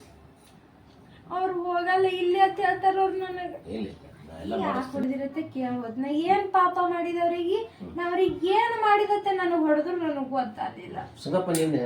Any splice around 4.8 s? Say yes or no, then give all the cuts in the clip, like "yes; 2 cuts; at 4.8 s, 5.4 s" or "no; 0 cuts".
yes; 1 cut; at 4.8 s